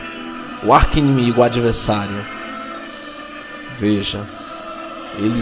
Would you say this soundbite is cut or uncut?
uncut